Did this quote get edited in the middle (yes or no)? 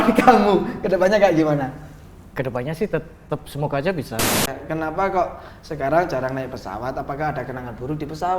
yes